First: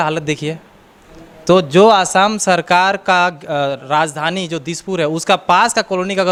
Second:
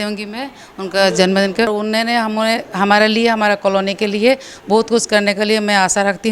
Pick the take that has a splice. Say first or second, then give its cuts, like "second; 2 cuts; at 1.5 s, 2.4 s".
second; 1 cut; at 1.7 s